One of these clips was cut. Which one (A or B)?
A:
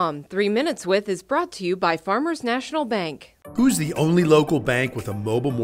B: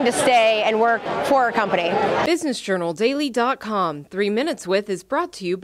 B